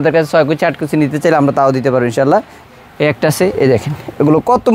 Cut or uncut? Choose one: cut